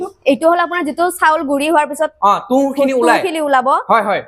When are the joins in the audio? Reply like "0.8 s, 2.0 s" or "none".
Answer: none